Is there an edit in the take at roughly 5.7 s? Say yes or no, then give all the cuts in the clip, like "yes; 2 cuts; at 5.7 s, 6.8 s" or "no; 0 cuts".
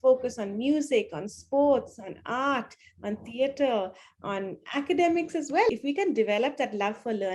yes; 1 cut; at 5.7 s